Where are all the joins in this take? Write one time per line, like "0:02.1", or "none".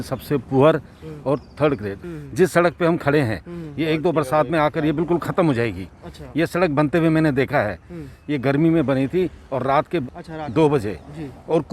0:02.0
0:10.1